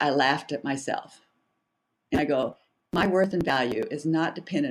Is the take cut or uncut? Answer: uncut